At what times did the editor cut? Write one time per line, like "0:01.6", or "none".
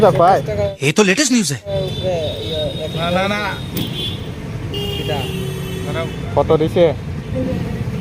none